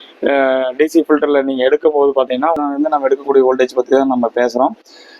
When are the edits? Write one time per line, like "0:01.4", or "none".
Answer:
0:02.6